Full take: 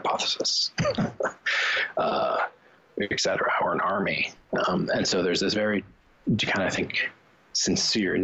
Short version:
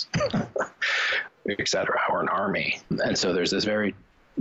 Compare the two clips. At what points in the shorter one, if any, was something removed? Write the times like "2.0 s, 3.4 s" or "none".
1.1 s, 2.9 s